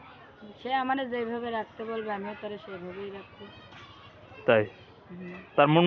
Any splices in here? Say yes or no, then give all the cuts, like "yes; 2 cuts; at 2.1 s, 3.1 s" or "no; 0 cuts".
no; 0 cuts